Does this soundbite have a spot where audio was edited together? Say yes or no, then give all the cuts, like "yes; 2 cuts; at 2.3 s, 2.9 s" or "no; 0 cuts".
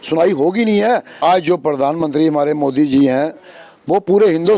yes; 1 cut; at 1.1 s